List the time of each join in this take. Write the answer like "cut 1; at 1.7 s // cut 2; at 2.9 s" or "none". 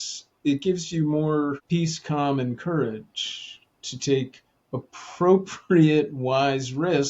cut 1; at 1.6 s